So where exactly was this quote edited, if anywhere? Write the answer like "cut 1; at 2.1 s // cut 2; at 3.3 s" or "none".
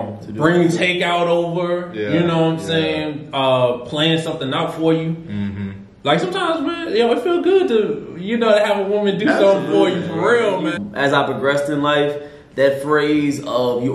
cut 1; at 10.8 s